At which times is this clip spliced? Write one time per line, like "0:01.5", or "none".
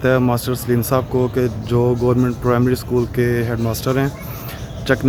none